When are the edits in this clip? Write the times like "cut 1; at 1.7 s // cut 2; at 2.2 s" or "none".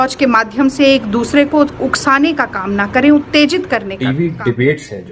cut 1; at 3.9 s